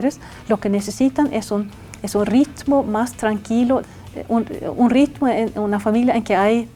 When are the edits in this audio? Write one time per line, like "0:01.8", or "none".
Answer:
0:03.9